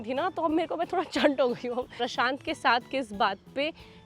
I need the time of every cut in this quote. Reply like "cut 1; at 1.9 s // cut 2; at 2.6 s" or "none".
cut 1; at 2.0 s